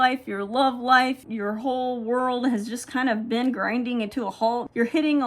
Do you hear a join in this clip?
yes; 1 cut; at 1.2 s

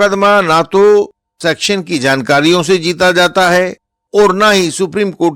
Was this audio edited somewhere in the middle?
no; 0 cuts

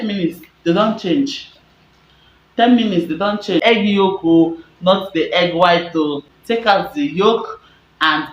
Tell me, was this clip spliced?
yes; 2 cuts; at 3.6 s, 6.3 s

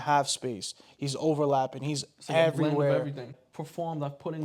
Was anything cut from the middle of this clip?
yes; 1 cut; at 3.3 s

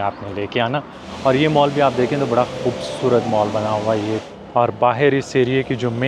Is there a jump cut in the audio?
yes; 2 cuts; at 1.0 s, 4.2 s

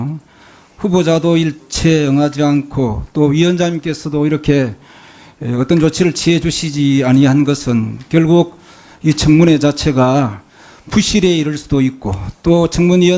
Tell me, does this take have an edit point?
no; 0 cuts

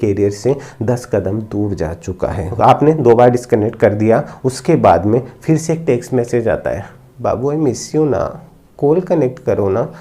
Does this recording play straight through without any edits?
no; 1 cut; at 2.4 s

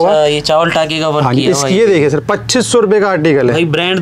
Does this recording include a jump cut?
no; 0 cuts

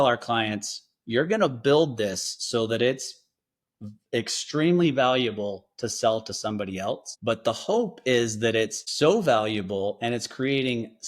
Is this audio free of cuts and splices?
no; 2 cuts; at 7.1 s, 8.8 s

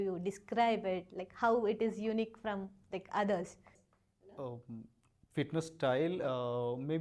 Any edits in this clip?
no; 0 cuts

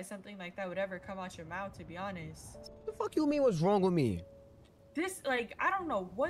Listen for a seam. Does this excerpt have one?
yes; 1 cut; at 2.5 s

